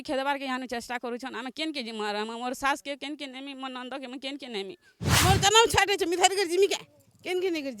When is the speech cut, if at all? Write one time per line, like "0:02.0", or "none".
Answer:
0:05.2